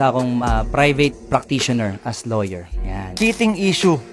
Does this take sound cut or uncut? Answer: cut